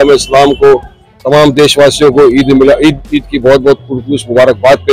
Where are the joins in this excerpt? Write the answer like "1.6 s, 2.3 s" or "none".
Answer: none